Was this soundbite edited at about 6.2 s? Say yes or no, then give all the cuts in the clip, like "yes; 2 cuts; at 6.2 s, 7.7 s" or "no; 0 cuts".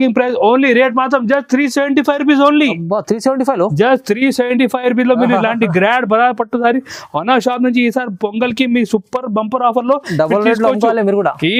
no; 0 cuts